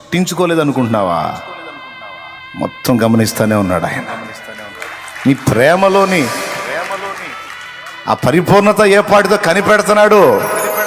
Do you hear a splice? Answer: no; 0 cuts

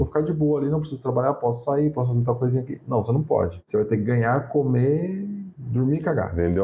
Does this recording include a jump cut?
no; 0 cuts

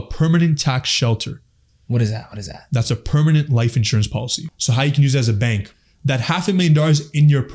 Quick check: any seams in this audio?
yes; 2 cuts; at 4.5 s, 5.7 s

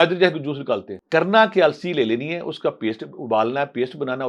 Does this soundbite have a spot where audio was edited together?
yes; 1 cut; at 0.9 s

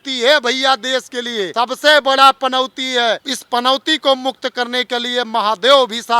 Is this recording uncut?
no; 2 cuts; at 1.5 s, 3.3 s

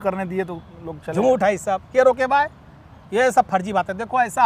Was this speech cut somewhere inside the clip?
no; 0 cuts

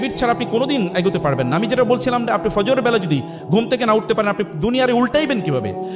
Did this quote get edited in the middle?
no; 0 cuts

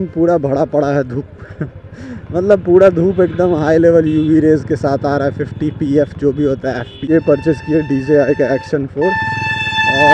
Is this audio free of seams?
no; 1 cut; at 7.0 s

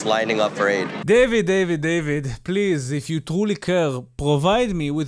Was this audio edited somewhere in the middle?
yes; 1 cut; at 0.9 s

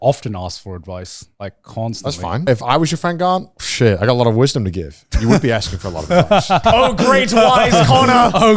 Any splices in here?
yes; 3 cuts; at 1.2 s, 2.4 s, 6.6 s

